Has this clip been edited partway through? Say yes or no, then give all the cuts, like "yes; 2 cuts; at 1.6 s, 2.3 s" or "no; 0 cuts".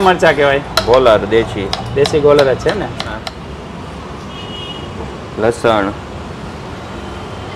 yes; 1 cut; at 3.3 s